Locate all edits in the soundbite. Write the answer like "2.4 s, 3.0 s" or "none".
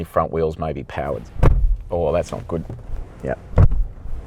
1.2 s, 2.8 s